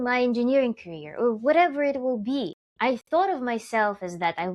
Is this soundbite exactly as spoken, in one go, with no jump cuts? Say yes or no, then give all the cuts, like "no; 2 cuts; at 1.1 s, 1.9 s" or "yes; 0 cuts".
no; 1 cut; at 2.6 s